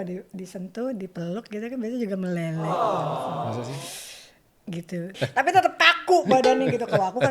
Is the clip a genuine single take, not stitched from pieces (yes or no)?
no